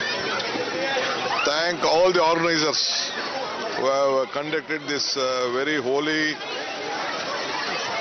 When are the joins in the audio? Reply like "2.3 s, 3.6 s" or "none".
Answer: 5.3 s